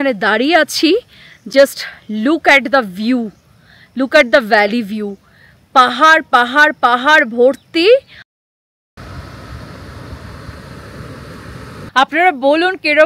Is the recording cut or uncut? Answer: cut